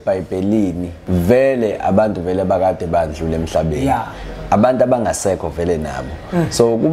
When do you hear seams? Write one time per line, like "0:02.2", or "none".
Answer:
0:00.9